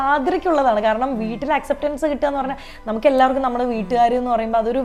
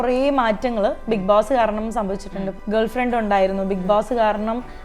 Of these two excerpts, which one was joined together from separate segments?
second; 1 cut; at 2.5 s

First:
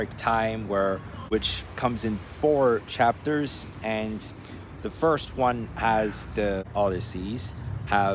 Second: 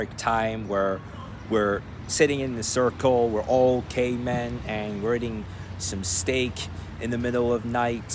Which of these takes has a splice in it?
first; 2 cuts; at 1.1 s, 6.7 s

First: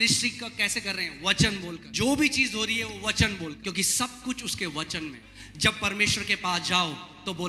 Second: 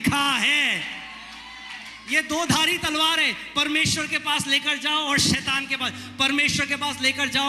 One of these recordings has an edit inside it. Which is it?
first; 3 cuts; at 1.8 s, 3.6 s, 5.3 s

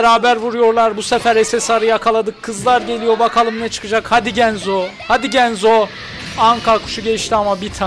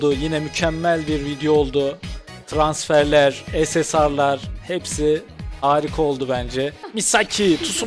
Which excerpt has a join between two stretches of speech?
second; 1 cut; at 6.8 s

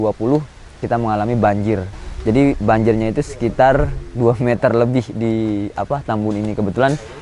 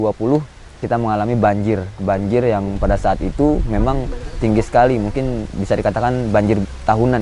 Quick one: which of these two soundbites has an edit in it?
first; 1 cut; at 1.9 s

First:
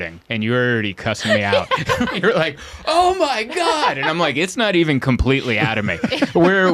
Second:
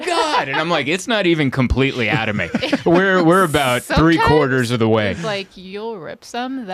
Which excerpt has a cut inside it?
first; 1 cut; at 2.1 s

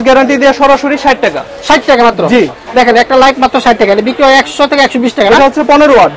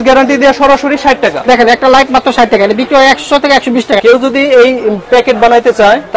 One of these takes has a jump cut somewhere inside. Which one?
second; 2 cuts; at 1.4 s, 4.0 s

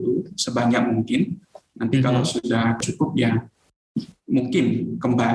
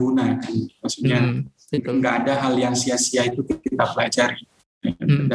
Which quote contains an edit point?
first; 1 cut; at 2.8 s

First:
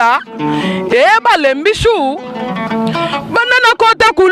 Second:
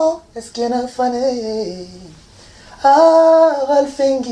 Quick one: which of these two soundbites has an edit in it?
first; 1 cut; at 2.5 s

